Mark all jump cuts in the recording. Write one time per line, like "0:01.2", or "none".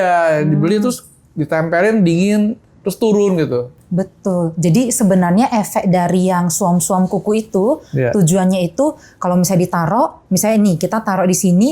0:03.8